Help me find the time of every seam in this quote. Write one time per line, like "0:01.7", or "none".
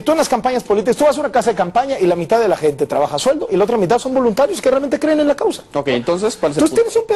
none